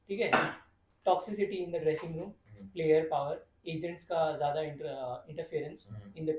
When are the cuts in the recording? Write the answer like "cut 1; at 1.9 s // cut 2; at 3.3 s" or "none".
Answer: none